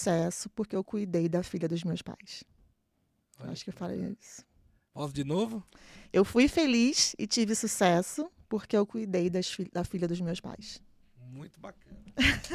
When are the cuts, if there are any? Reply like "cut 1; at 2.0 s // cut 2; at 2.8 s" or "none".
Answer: none